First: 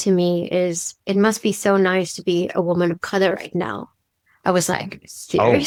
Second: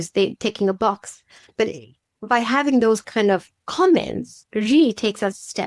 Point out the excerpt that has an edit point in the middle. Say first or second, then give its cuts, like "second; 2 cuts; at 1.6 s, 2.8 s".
second; 1 cut; at 3.1 s